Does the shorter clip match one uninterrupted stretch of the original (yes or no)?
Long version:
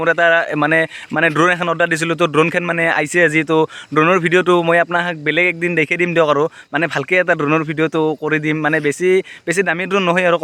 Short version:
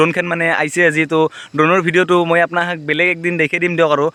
yes